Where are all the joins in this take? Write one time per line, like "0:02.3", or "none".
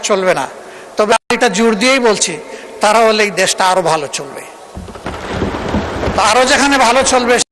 none